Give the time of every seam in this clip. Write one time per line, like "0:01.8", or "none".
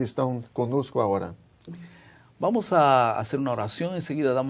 0:03.6